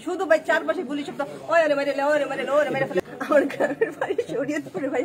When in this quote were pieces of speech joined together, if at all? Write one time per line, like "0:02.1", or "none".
0:03.0